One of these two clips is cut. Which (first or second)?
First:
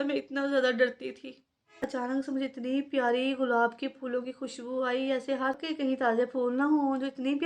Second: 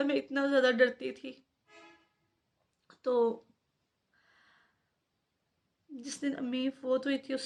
first